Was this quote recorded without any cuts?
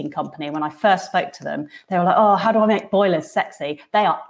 yes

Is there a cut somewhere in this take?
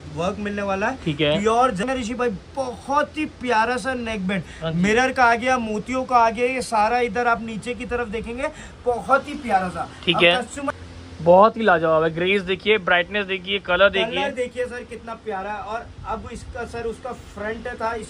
yes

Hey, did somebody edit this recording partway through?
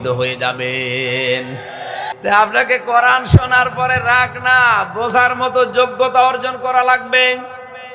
yes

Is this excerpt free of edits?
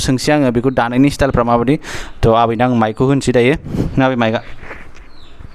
yes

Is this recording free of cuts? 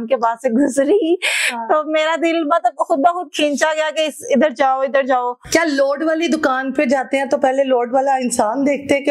yes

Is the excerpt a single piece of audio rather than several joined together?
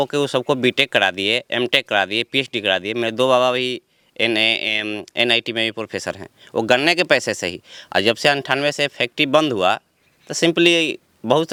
yes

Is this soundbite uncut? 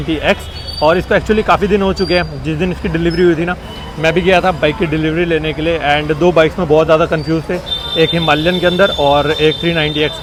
yes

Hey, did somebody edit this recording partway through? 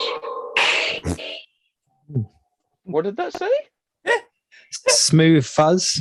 no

